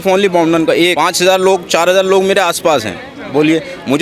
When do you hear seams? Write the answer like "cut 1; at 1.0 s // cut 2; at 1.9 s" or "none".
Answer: cut 1; at 0.9 s